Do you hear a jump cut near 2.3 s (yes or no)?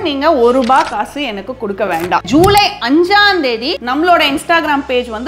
yes